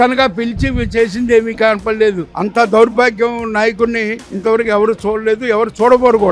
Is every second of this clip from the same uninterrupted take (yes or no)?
no